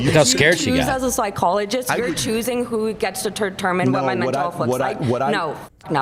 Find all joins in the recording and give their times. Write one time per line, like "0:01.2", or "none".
none